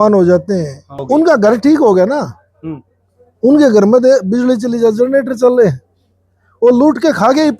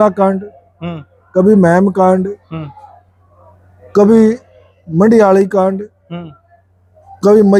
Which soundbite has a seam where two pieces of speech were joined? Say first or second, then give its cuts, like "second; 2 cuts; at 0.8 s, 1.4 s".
first; 1 cut; at 1.0 s